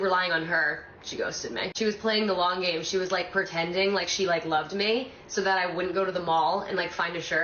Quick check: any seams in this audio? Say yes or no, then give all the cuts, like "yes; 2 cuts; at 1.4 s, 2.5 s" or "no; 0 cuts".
no; 0 cuts